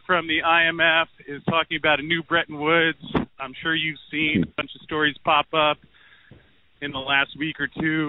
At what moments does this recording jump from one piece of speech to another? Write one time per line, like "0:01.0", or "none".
none